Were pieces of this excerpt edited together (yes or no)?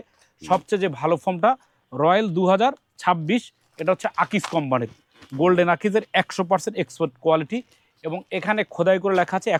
no